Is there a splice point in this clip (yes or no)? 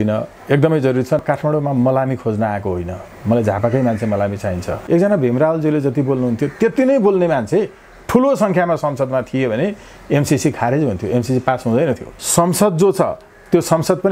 yes